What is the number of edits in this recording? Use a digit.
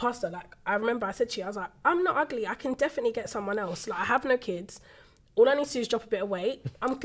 0